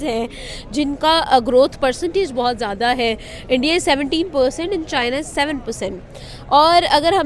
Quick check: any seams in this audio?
no; 0 cuts

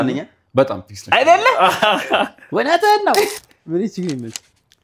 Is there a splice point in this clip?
yes; 1 cut; at 3.3 s

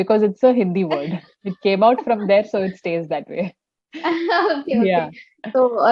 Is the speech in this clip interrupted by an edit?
no; 0 cuts

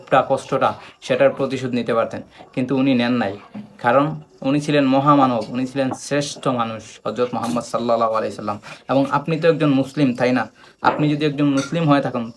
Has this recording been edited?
no; 0 cuts

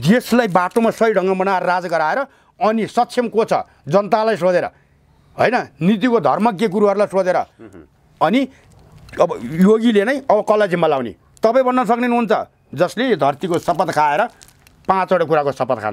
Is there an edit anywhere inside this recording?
no; 0 cuts

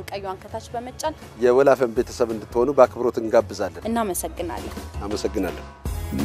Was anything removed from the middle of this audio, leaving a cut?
yes; 1 cut; at 3.8 s

